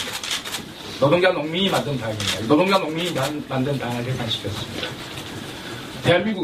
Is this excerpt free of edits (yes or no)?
yes